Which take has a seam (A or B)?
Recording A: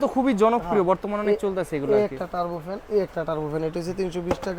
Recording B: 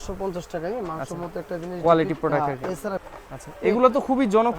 B